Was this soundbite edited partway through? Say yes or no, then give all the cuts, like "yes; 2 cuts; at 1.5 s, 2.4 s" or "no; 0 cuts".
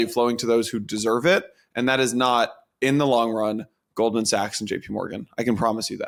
no; 0 cuts